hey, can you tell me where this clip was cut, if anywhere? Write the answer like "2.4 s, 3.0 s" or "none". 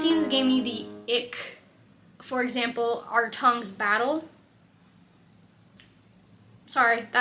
none